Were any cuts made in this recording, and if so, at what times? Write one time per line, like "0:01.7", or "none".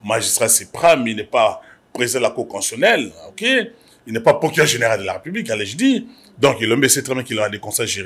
none